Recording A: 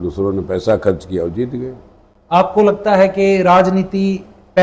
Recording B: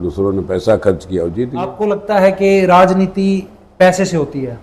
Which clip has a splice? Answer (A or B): B